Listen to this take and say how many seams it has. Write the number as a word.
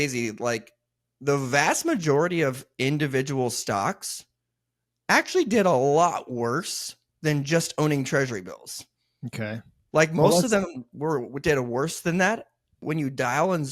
one